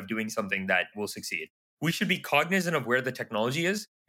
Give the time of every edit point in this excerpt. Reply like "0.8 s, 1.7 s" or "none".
1.6 s